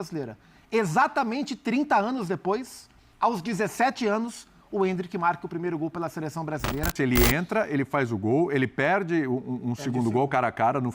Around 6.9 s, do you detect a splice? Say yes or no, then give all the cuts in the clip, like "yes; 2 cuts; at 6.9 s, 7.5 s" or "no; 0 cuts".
yes; 1 cut; at 6.9 s